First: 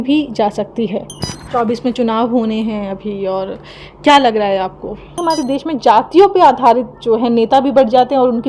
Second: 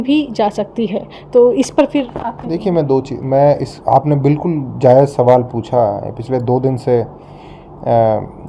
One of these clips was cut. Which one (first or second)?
first